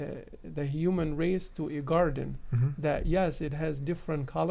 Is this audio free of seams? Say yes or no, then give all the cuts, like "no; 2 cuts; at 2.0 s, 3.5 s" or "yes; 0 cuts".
yes; 0 cuts